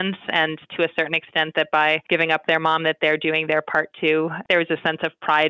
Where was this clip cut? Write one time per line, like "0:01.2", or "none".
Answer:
0:02.0
0:04.4